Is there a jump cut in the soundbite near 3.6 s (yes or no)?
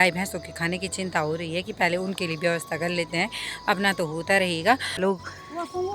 no